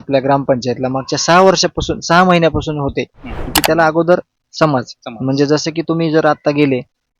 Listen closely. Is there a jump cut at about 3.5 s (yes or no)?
yes